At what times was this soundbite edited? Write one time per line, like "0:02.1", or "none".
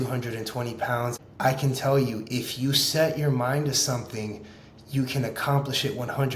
0:01.1